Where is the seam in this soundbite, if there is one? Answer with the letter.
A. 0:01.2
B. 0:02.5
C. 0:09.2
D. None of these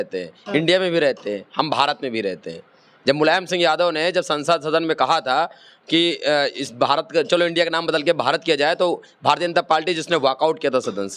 D